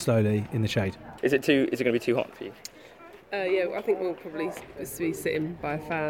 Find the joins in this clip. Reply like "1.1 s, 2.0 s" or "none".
none